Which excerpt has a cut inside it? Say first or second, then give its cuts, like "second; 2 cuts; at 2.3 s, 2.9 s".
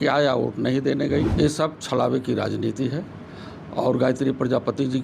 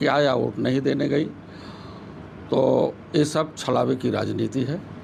first; 1 cut; at 1.3 s